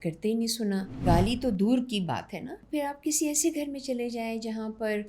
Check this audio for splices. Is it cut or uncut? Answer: cut